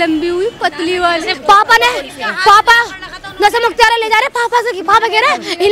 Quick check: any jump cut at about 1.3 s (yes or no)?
yes